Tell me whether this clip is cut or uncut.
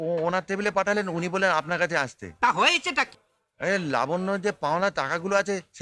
uncut